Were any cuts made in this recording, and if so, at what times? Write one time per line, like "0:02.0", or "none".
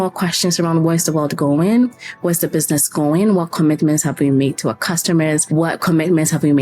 0:05.4